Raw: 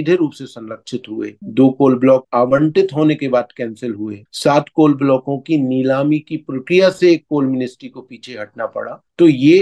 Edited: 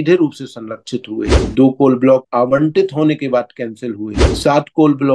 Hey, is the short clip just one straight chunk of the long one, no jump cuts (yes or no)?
yes